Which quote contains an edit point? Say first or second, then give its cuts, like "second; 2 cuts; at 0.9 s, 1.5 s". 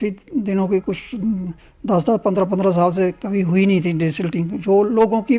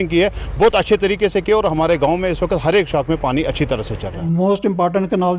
second; 1 cut; at 4.2 s